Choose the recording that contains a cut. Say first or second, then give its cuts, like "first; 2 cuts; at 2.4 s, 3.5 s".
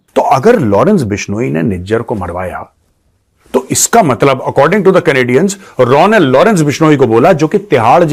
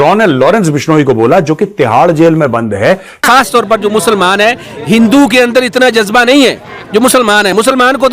second; 2 cuts; at 3.2 s, 6.7 s